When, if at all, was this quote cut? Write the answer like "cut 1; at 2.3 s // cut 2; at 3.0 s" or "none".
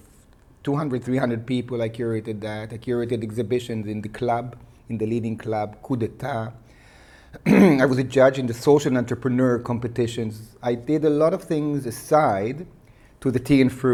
none